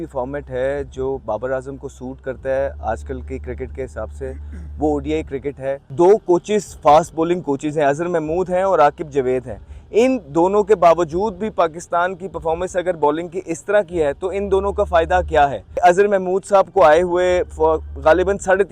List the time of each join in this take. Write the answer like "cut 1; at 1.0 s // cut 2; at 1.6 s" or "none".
cut 1; at 5.8 s // cut 2; at 15.6 s